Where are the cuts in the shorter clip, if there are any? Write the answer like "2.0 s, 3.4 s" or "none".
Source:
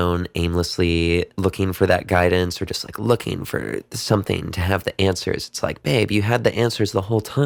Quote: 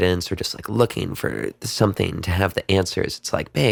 none